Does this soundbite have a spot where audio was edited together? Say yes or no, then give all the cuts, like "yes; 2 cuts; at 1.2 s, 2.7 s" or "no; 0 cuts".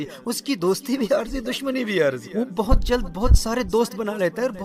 yes; 1 cut; at 2.2 s